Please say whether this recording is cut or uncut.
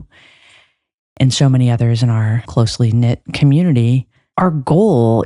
cut